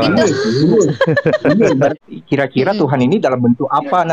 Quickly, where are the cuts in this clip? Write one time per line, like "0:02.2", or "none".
0:01.9